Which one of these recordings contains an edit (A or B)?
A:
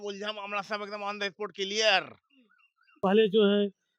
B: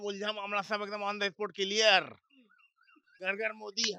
A